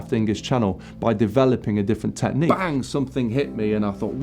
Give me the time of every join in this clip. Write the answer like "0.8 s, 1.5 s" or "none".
2.5 s